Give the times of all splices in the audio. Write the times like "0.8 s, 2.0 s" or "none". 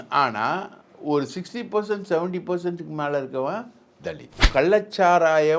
4.4 s